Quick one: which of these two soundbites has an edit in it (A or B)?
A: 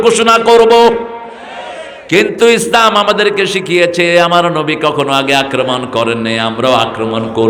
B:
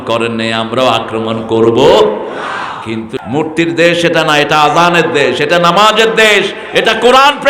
B